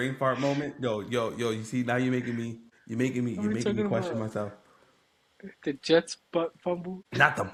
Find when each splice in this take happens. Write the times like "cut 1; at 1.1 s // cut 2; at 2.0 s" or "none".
none